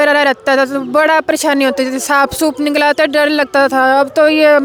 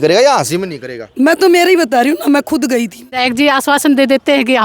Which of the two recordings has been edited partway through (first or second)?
second